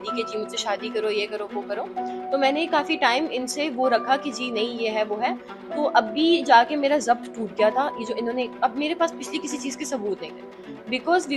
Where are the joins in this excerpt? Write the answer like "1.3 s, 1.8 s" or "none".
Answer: none